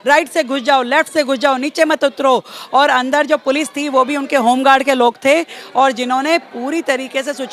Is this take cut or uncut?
uncut